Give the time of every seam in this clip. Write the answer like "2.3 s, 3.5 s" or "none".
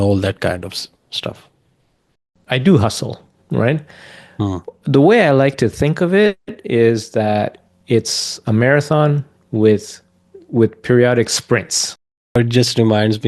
2.3 s, 12.3 s

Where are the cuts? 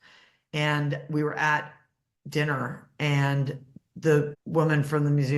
4.4 s

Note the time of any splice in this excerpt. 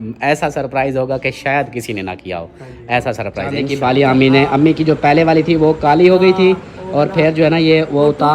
3.7 s

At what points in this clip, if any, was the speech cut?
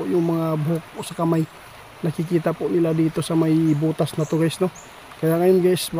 none

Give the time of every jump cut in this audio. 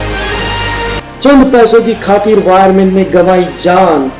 0.9 s

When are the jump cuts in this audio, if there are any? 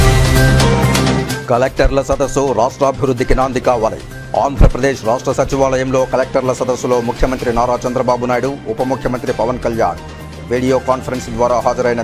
1.2 s

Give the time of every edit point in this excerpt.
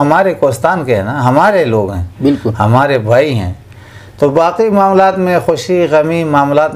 none

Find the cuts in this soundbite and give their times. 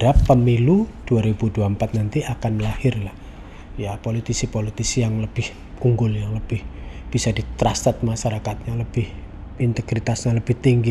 none

